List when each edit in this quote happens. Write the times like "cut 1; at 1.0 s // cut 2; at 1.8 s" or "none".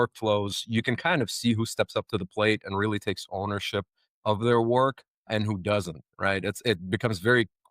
cut 1; at 5.3 s